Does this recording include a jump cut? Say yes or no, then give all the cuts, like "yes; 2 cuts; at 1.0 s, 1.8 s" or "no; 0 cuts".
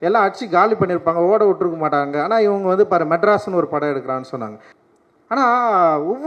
yes; 1 cut; at 4.6 s